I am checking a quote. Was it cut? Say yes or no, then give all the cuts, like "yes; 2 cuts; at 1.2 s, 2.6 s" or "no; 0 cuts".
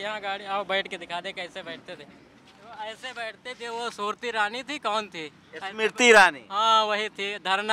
no; 0 cuts